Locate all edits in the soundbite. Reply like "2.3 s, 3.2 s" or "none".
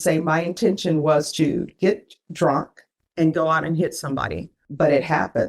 4.6 s